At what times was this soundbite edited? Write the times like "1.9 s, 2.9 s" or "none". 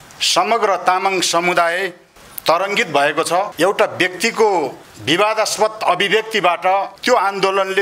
3.5 s, 4.9 s, 6.9 s